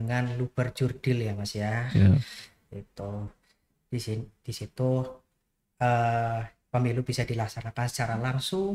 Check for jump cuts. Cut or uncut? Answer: uncut